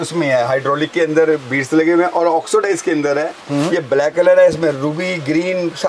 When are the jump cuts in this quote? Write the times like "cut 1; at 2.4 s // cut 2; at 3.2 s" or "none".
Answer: none